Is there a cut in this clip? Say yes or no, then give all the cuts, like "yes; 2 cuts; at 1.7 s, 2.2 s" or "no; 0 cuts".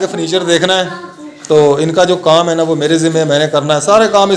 no; 0 cuts